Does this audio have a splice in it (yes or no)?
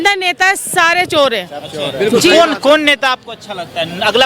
no